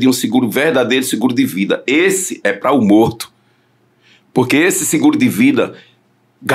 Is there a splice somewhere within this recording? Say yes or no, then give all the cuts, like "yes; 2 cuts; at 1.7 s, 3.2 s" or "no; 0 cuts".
no; 0 cuts